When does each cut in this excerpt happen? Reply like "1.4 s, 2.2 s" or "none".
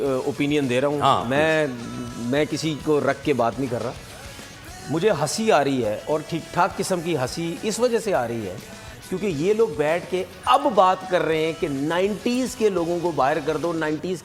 none